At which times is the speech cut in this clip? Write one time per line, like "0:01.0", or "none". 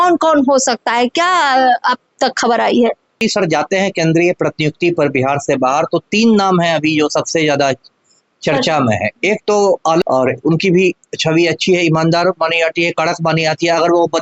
0:03.1
0:10.0

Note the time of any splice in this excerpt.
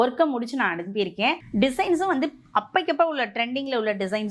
0:01.4

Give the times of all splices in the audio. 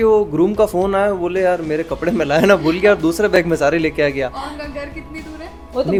none

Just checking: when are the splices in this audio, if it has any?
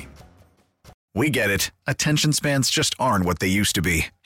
0:01.0

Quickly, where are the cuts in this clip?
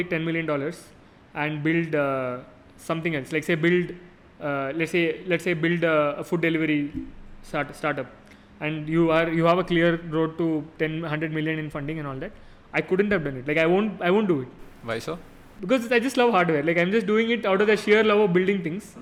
none

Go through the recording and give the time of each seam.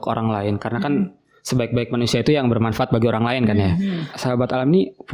0:04.2

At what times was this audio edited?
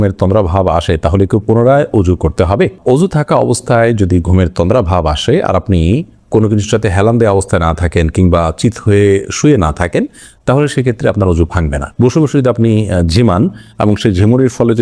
none

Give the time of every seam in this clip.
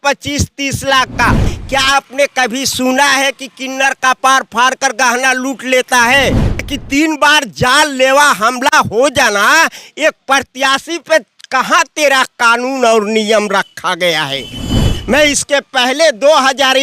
0:01.4
0:06.7

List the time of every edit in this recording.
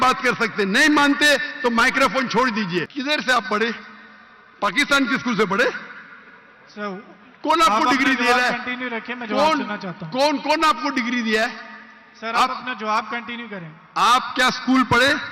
0:02.9

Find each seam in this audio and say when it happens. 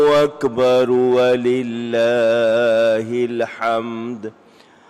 none

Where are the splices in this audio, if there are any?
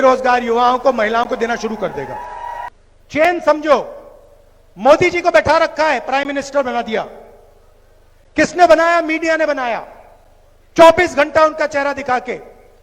0:02.7

